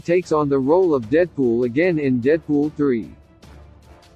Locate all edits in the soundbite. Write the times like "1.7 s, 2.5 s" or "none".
3.2 s